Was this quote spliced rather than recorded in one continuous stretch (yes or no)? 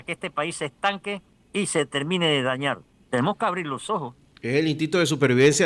yes